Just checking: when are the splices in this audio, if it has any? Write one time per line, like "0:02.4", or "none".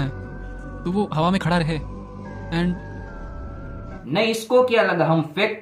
none